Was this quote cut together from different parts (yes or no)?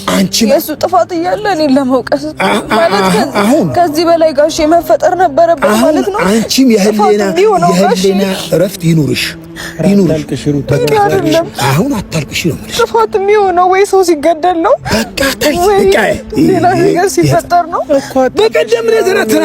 no